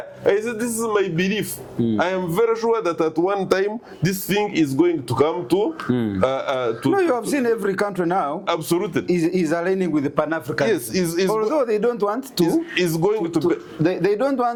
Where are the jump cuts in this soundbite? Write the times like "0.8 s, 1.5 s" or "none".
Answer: none